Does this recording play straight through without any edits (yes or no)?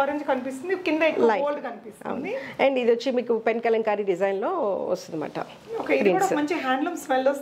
yes